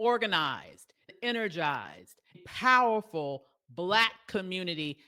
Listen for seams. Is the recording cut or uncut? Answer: cut